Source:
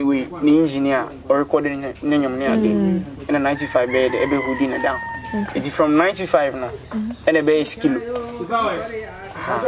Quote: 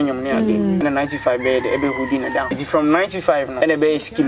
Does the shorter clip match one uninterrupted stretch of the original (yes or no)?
no